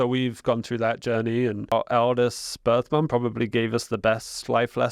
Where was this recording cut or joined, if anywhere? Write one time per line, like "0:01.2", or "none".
0:01.7